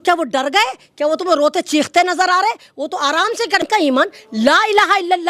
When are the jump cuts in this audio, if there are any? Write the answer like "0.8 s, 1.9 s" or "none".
3.7 s